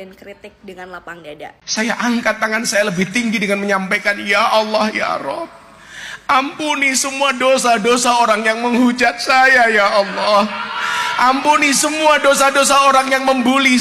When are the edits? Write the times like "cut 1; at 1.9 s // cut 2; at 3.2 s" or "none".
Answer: cut 1; at 1.5 s